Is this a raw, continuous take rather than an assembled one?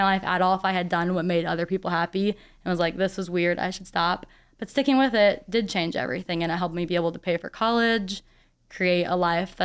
yes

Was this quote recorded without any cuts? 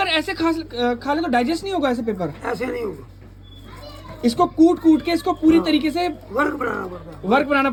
yes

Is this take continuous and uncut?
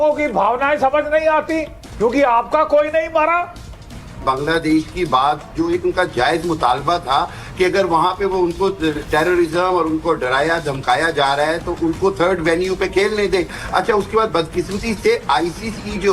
no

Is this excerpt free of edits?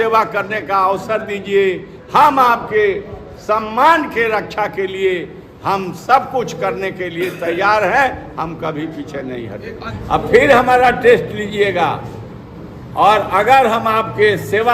no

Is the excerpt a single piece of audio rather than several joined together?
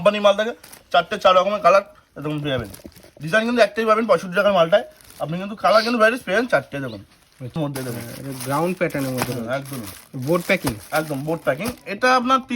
no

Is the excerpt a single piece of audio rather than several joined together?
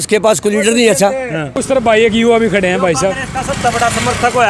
no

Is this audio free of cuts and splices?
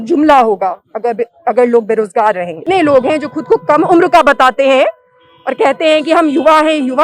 no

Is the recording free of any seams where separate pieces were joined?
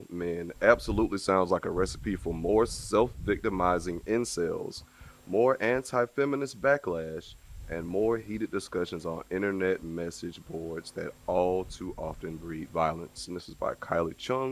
yes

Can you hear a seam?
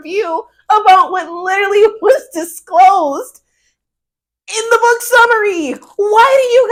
no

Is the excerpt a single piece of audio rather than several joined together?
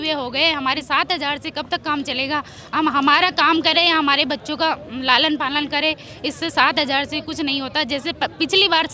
yes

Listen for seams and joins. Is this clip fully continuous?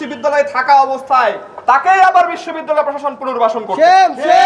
yes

